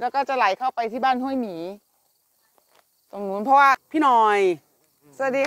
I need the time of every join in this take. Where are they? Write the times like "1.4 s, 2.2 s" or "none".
3.8 s